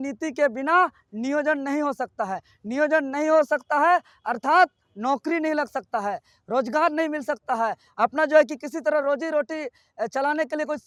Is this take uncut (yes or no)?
yes